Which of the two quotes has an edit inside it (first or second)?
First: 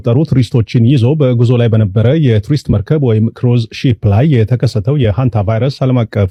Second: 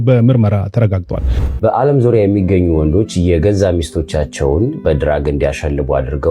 second